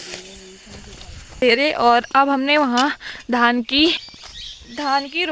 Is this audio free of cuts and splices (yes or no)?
no